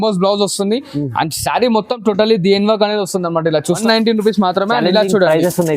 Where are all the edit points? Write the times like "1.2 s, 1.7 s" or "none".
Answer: 3.8 s